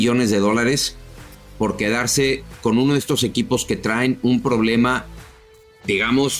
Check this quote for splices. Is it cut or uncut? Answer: uncut